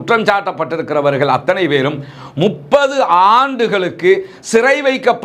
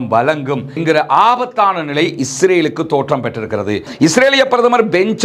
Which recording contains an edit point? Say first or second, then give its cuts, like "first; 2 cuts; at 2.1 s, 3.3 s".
second; 1 cut; at 3.9 s